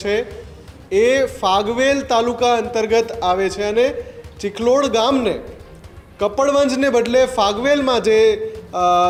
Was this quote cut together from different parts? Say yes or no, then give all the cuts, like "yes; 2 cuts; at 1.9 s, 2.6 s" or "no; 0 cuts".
no; 0 cuts